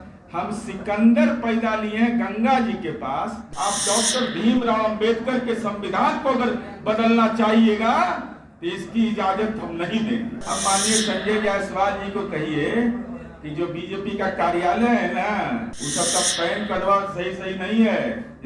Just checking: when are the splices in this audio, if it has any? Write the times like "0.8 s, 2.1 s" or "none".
3.4 s, 15.8 s